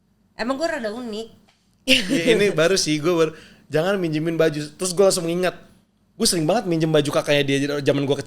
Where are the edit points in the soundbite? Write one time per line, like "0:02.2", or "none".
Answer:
none